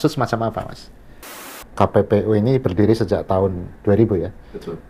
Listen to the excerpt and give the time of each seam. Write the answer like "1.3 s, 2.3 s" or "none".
1.3 s